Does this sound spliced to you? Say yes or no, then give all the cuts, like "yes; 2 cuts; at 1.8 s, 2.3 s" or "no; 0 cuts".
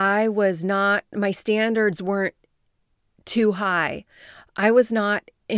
no; 0 cuts